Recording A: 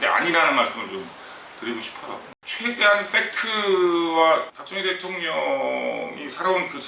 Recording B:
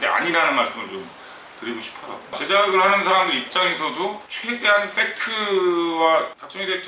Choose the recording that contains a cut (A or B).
A